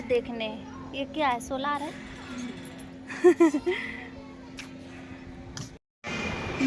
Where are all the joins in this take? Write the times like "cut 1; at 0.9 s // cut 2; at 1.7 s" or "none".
none

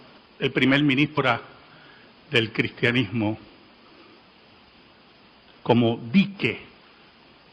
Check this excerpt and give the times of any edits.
none

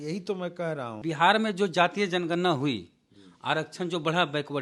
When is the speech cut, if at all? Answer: cut 1; at 1.0 s

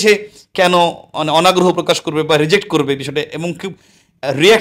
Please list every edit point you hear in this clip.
none

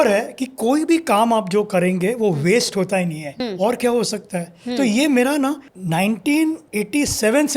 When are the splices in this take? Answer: cut 1; at 3.3 s // cut 2; at 5.7 s // cut 3; at 6.6 s

